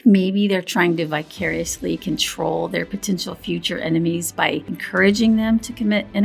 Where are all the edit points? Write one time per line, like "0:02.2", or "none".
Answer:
0:04.7